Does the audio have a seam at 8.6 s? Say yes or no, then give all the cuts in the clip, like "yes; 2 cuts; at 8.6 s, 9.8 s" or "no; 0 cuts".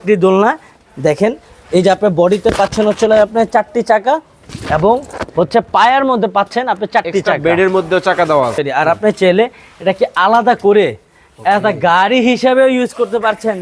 yes; 1 cut; at 8.6 s